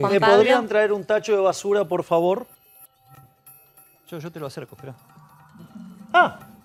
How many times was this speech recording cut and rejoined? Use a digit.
0